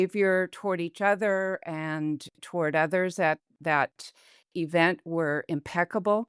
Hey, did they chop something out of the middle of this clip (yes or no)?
yes